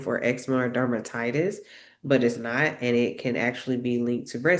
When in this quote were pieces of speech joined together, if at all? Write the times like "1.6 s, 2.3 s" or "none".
none